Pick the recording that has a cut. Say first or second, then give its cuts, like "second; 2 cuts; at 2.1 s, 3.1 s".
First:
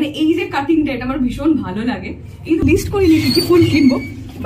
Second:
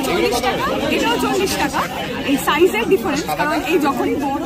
first; 1 cut; at 2.6 s